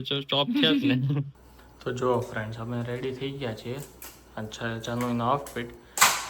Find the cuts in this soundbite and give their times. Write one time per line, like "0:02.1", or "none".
0:01.3